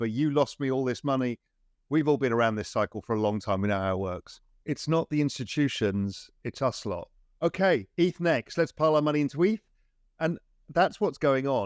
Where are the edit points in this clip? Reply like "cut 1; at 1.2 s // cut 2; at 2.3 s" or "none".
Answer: cut 1; at 7.2 s